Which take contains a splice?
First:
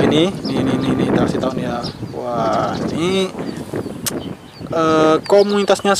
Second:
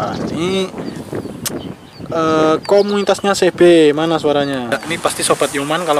second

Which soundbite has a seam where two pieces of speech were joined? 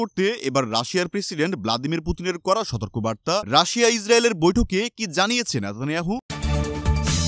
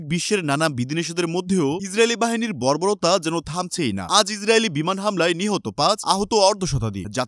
first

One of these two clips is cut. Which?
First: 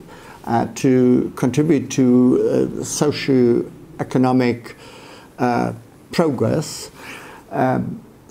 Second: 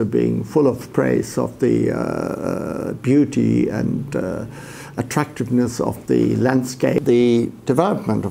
second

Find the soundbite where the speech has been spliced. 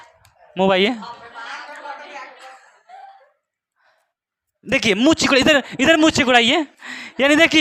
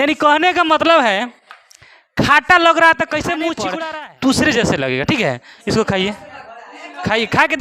second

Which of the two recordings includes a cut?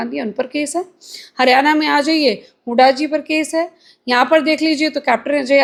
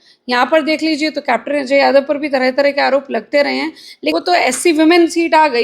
second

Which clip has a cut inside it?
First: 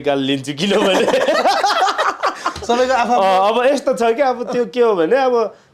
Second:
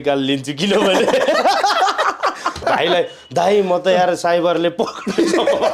second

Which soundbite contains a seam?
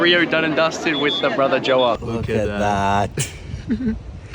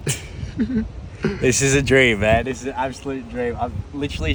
first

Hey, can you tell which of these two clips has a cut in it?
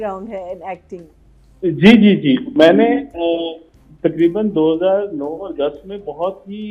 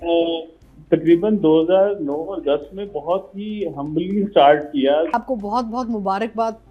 second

